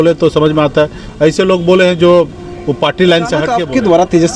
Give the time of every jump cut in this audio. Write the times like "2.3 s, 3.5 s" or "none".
3.5 s